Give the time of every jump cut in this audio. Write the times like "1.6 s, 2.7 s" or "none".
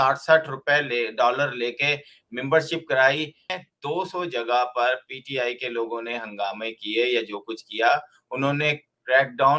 3.5 s